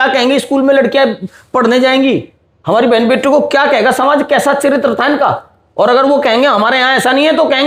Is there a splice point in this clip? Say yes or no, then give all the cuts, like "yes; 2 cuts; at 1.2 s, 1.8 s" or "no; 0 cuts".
no; 0 cuts